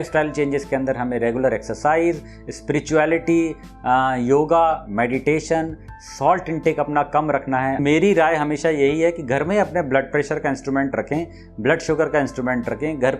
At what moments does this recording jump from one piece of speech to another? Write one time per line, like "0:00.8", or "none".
0:07.8

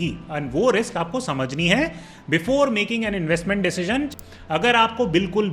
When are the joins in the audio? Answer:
0:04.1

